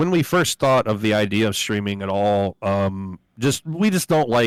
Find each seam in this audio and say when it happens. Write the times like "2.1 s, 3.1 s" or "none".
none